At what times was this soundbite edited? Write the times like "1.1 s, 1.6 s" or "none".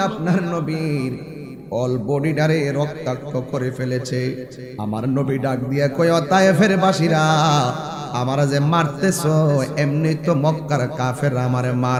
none